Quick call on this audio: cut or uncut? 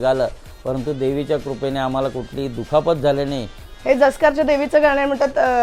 cut